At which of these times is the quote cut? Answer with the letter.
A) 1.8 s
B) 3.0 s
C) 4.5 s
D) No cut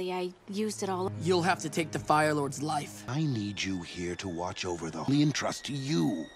B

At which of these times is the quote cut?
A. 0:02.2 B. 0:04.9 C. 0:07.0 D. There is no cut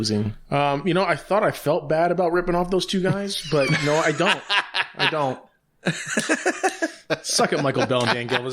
C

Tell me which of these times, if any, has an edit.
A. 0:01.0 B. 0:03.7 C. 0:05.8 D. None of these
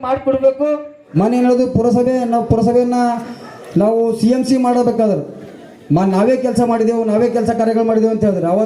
A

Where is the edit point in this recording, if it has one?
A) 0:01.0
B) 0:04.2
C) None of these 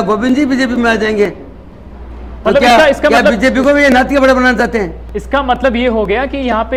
C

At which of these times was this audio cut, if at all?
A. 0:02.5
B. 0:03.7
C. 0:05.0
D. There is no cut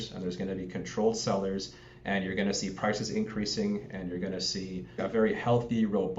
C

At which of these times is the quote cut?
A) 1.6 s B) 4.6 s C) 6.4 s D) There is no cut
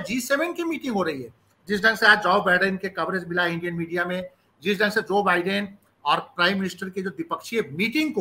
D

